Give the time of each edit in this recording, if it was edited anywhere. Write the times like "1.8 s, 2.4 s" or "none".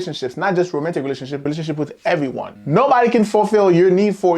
1.4 s, 2.5 s